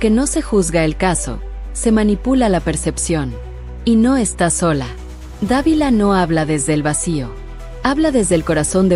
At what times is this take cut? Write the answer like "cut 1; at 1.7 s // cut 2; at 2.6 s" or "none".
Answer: none